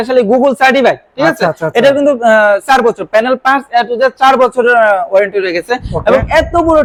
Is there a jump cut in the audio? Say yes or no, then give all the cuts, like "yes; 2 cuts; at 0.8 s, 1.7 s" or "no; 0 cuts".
no; 0 cuts